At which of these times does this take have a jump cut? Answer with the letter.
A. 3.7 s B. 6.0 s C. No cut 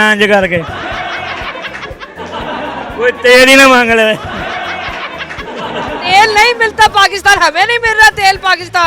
B